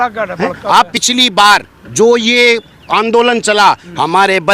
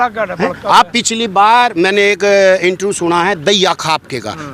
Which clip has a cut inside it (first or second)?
first